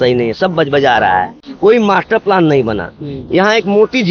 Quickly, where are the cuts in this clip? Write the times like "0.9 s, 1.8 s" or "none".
none